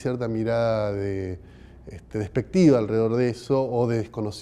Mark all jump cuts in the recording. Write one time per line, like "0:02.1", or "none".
0:01.1